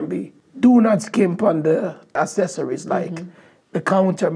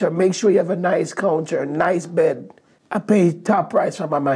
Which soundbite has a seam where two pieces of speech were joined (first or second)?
first